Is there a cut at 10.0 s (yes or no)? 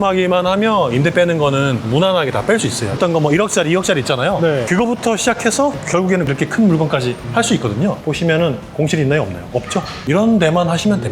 yes